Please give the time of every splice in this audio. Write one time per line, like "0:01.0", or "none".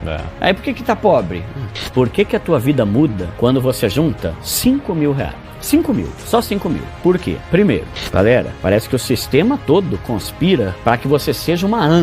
0:01.8
0:08.0